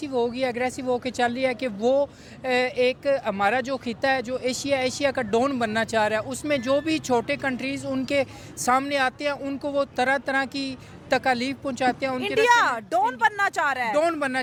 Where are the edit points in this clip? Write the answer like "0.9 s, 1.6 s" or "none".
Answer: none